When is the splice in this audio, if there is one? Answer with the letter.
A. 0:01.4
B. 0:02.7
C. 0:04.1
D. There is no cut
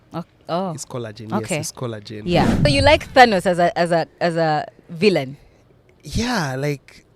B